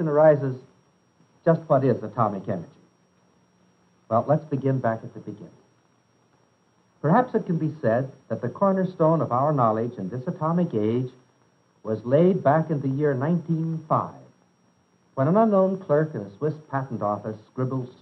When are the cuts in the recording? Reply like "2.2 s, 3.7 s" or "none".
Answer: none